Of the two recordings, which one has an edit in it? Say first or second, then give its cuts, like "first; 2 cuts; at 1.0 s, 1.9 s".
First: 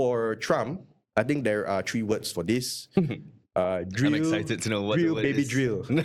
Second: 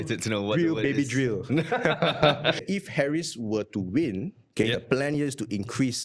second; 1 cut; at 2.6 s